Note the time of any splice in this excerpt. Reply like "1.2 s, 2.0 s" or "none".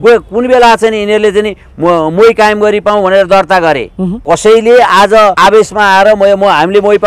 4.2 s, 5.4 s